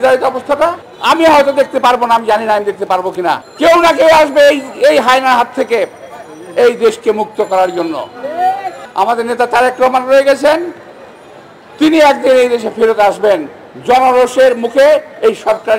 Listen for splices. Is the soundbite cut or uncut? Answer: cut